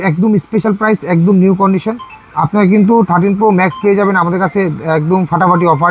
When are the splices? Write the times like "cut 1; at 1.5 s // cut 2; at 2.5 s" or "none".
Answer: none